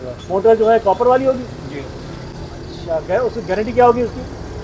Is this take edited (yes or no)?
no